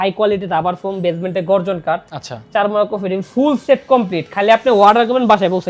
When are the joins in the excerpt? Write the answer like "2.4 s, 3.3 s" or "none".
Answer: none